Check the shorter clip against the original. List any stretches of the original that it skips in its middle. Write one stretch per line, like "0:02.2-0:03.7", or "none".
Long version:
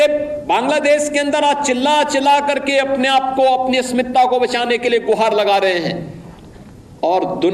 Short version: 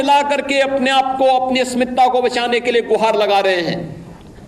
none

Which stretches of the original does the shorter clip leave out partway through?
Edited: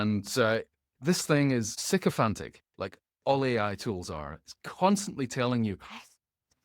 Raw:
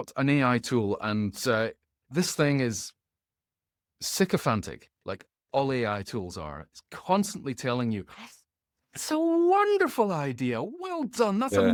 0:02.9-0:04.0

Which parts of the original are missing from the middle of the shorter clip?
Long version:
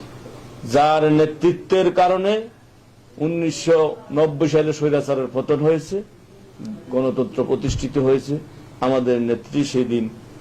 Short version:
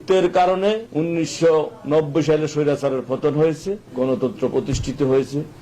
0:02.5-0:03.1
0:06.1-0:06.8

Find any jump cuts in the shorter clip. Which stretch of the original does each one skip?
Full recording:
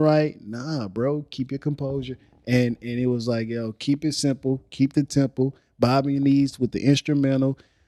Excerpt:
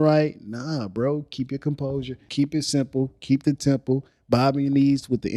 0:02.2-0:03.7

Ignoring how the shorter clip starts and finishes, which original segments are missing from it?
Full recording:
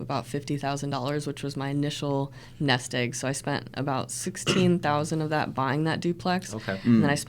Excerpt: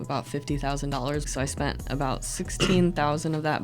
0:01.3-0:03.1

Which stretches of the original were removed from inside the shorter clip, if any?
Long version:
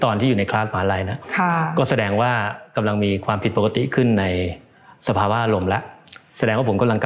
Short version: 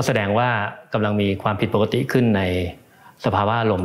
none

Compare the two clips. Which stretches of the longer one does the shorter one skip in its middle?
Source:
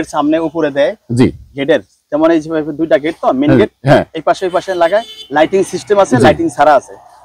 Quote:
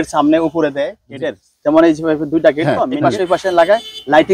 0:01.0-0:01.5
0:03.3-0:04.1

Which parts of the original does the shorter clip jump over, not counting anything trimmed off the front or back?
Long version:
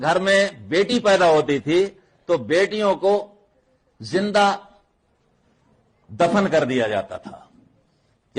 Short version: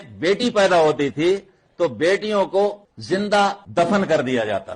0:03.4-0:03.9
0:04.7-0:06.1

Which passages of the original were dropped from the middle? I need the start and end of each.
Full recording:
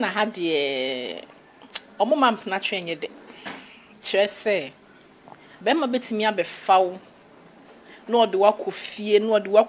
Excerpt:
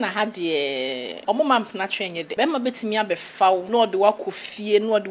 0:01.1-0:01.8
0:03.0-0:05.6
0:06.9-0:08.0

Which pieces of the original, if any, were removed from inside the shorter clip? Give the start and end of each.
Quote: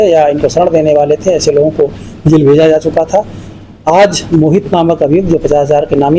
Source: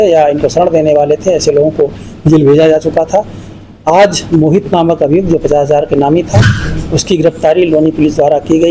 none

